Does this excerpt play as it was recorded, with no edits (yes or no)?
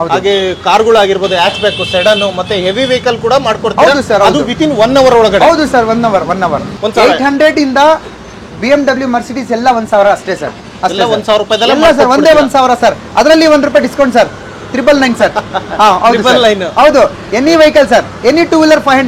no